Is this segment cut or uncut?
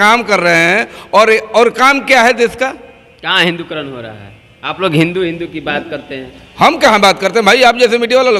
uncut